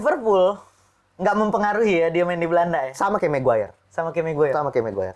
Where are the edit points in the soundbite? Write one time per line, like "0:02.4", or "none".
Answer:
none